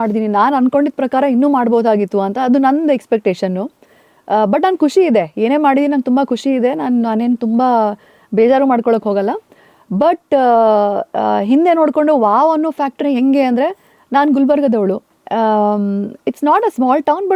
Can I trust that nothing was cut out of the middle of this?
yes; 0 cuts

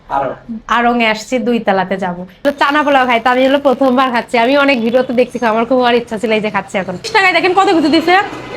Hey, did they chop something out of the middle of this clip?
yes; 2 cuts; at 2.4 s, 7.1 s

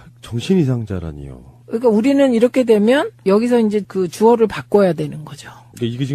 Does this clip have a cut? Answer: yes; 1 cut; at 2.3 s

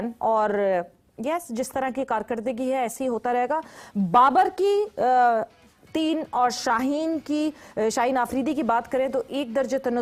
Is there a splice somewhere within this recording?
no; 0 cuts

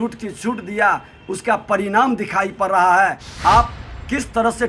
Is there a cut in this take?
yes; 1 cut; at 3.3 s

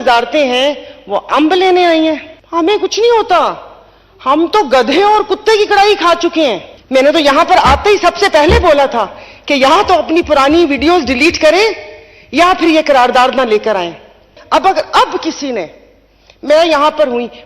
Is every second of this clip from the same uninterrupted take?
no; 3 cuts; at 2.3 s, 6.7 s, 14.3 s

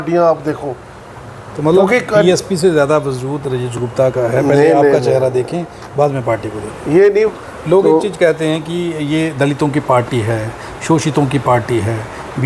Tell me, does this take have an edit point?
yes; 1 cut; at 7.3 s

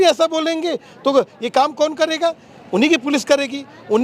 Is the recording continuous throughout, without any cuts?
yes; 0 cuts

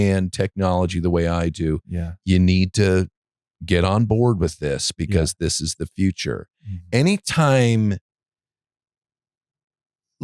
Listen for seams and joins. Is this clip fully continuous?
yes; 0 cuts

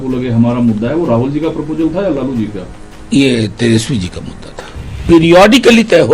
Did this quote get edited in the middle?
yes; 1 cut; at 5.0 s

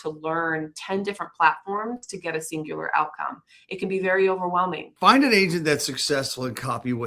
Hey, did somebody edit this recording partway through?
yes; 1 cut; at 4.8 s

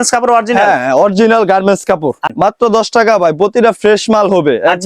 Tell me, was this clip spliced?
yes; 1 cut; at 2.3 s

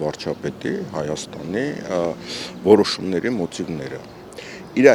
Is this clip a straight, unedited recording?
yes; 0 cuts

